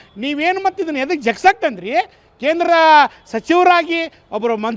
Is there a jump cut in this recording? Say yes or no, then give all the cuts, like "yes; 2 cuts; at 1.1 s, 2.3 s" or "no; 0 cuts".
no; 0 cuts